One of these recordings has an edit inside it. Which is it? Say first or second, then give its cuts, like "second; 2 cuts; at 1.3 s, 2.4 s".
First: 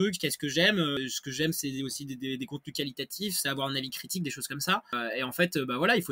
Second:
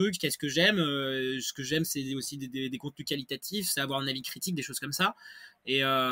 first; 2 cuts; at 1.0 s, 4.9 s